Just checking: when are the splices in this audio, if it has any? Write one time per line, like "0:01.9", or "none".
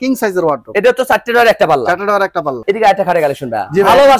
0:02.6